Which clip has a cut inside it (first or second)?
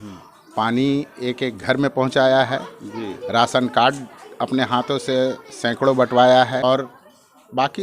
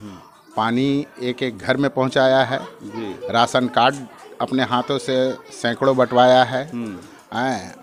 first